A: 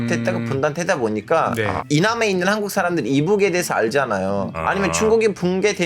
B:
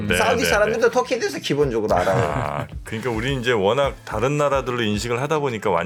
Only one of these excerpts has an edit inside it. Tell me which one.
A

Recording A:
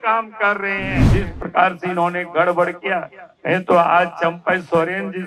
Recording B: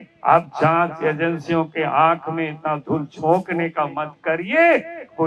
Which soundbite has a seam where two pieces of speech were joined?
A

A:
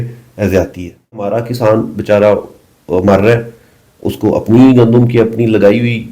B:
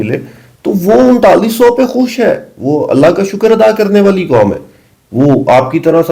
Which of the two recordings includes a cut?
A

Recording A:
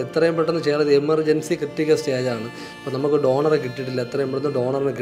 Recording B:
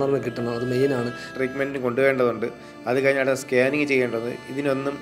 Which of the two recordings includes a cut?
B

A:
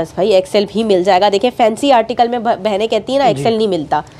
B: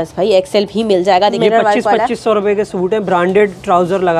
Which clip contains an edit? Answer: B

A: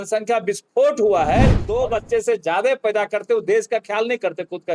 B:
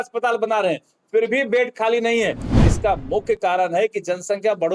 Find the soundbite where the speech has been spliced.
A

